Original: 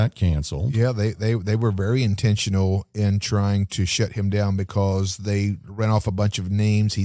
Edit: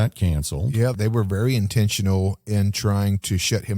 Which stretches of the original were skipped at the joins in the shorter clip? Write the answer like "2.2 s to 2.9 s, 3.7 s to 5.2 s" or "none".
1.0 s to 1.4 s